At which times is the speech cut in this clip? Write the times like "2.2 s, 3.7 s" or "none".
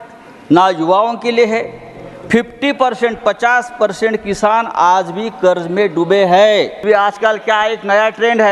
6.8 s